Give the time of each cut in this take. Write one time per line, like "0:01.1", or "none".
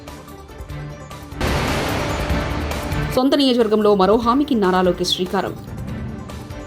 0:01.1
0:03.1